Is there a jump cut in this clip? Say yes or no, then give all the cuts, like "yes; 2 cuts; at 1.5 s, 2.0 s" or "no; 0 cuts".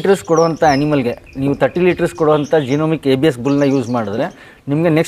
no; 0 cuts